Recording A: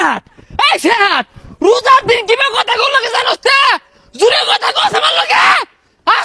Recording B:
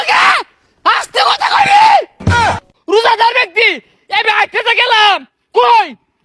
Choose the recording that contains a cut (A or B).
B